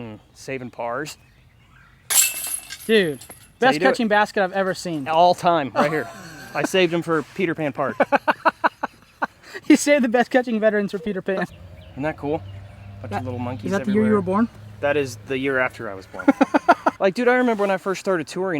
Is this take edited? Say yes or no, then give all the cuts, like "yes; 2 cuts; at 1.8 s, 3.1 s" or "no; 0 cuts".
yes; 2 cuts; at 11.5 s, 17.0 s